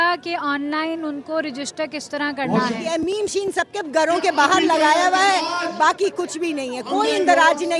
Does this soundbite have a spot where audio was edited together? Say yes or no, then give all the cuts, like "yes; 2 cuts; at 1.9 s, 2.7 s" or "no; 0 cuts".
yes; 1 cut; at 2.8 s